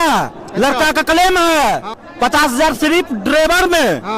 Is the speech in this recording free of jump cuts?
no; 1 cut; at 2.0 s

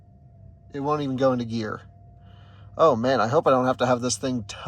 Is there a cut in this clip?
no; 0 cuts

